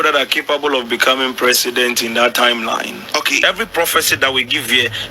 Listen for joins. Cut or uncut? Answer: cut